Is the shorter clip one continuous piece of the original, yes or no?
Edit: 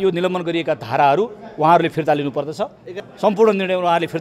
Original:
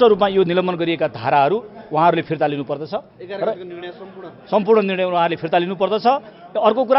no